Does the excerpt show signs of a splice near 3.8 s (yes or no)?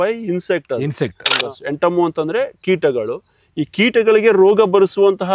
no